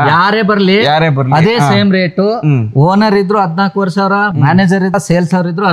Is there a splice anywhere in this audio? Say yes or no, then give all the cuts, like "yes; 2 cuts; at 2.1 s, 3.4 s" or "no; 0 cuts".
no; 0 cuts